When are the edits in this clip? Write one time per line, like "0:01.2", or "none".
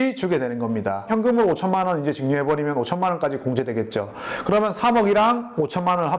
0:01.0